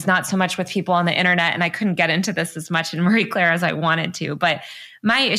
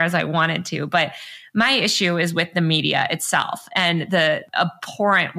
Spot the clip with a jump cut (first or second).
second